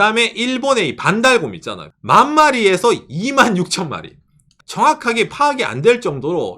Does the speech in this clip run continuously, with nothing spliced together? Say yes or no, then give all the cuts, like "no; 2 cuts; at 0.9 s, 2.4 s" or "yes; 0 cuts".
no; 1 cut; at 4.5 s